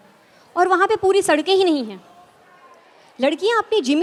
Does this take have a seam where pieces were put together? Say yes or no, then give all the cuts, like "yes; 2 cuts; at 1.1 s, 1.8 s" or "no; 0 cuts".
no; 0 cuts